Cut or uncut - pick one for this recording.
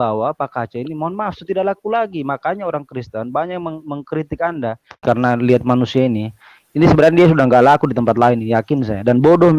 cut